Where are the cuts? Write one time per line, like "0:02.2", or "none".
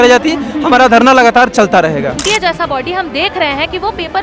0:02.2